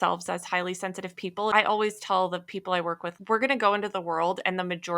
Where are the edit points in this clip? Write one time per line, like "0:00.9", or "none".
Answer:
0:01.5
0:03.1